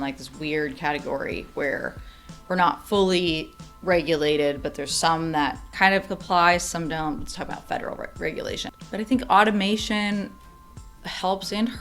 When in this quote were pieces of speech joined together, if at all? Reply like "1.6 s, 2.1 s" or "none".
5.7 s, 8.7 s